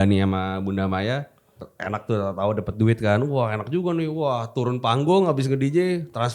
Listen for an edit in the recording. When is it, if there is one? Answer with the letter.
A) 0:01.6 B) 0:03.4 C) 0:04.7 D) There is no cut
A